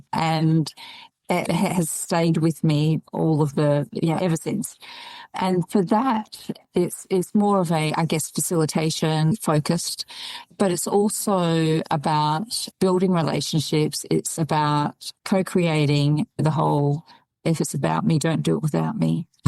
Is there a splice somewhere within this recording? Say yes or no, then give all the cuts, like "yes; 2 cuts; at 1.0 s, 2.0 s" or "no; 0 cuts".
yes; 2 cuts; at 5.3 s, 10.5 s